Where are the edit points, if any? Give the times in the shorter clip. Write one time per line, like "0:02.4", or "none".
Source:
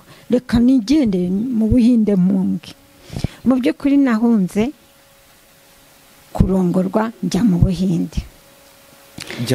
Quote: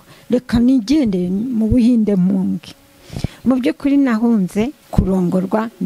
0:04.8